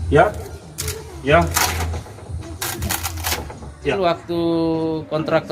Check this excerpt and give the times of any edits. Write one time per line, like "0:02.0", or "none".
0:03.9